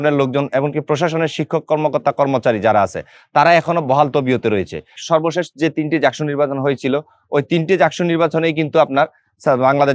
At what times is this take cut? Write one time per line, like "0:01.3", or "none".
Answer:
0:04.9

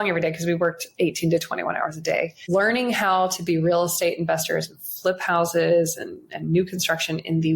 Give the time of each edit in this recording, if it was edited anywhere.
0:02.4

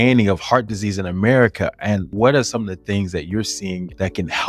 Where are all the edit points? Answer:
none

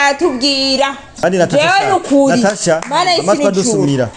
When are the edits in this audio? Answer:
0:01.0

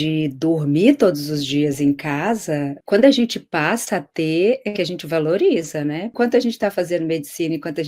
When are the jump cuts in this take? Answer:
0:02.8
0:06.1

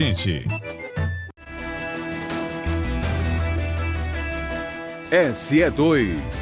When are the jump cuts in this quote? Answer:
0:01.6

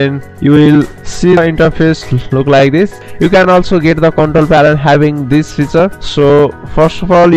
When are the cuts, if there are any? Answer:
0:01.4

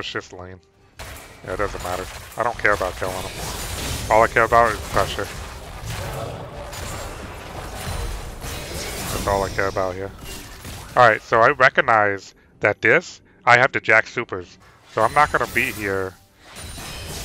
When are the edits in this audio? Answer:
0:00.9

